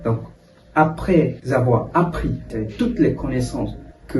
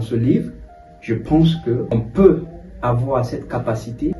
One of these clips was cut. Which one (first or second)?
first